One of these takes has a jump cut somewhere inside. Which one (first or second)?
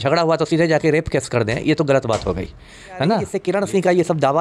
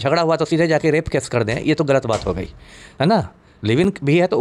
first